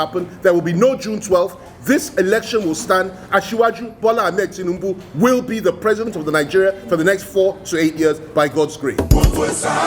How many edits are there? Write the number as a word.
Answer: one